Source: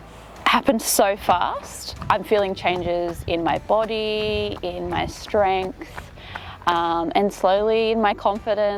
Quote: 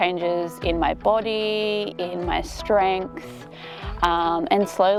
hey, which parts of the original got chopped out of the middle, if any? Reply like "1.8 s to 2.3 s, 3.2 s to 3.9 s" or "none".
none